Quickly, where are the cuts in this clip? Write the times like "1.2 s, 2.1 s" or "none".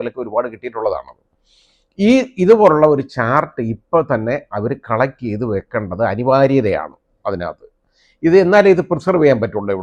none